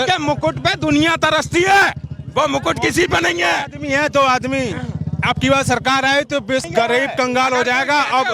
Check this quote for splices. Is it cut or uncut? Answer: cut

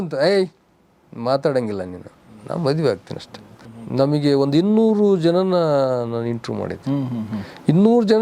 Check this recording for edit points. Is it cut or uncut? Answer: cut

